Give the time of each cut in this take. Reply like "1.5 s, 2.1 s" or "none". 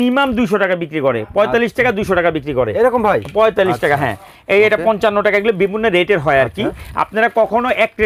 none